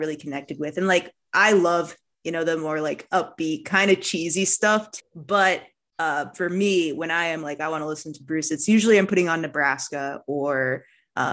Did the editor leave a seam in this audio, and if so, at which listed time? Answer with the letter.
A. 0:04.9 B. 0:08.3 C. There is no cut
A